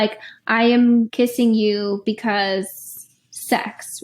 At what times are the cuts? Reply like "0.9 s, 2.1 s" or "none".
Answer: 1.1 s